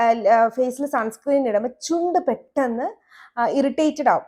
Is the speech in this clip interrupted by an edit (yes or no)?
no